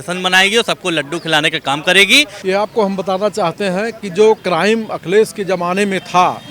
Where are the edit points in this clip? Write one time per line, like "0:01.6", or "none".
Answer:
0:02.3
0:04.4